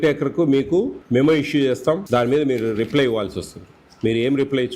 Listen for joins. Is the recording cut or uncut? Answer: cut